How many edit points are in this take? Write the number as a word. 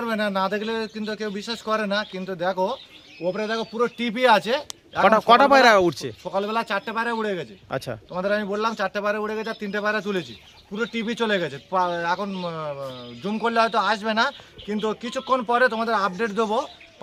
zero